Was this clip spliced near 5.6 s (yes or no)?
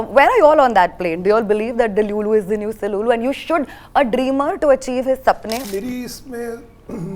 yes